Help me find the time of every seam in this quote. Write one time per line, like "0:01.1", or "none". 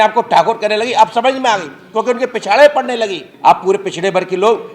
0:03.2